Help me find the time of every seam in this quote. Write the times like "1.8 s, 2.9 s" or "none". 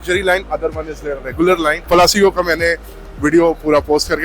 1.9 s